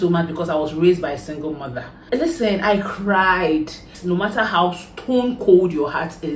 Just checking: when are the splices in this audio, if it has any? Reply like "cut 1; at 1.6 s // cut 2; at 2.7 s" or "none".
cut 1; at 1.9 s // cut 2; at 3.9 s